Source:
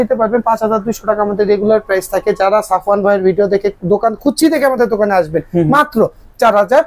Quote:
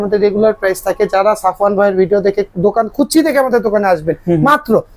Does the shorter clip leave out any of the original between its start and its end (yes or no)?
no